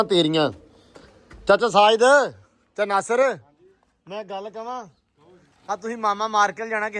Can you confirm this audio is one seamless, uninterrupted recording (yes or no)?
yes